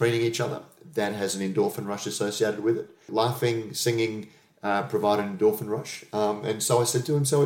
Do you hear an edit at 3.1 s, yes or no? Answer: yes